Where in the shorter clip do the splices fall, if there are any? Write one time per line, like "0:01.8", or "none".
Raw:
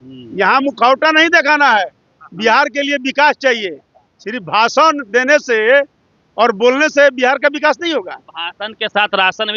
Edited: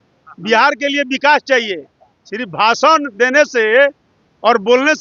none